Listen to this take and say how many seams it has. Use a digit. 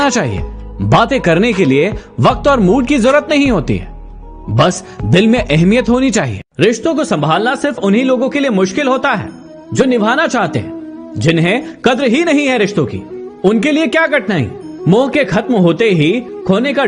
0